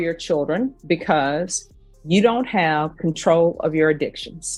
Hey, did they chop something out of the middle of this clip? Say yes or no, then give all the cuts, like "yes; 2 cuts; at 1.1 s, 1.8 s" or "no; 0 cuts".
no; 0 cuts